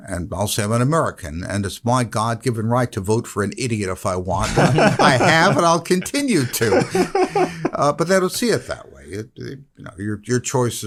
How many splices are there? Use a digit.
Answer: 0